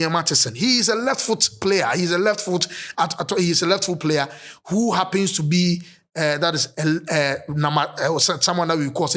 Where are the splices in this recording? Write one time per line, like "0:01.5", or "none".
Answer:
none